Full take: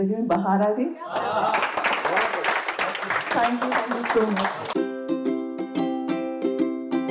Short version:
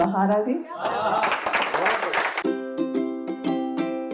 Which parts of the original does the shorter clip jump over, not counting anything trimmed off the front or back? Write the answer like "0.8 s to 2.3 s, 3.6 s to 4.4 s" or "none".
2.7 s to 4.7 s